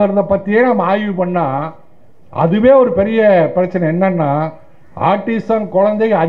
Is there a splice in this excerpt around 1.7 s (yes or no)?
no